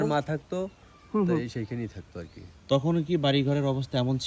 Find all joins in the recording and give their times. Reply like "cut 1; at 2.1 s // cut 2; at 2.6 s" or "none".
none